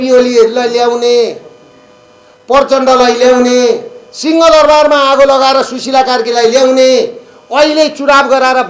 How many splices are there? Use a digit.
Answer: 0